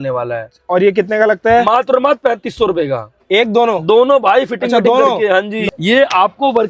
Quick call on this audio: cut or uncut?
cut